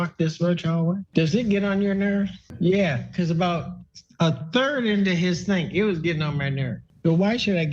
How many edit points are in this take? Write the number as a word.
two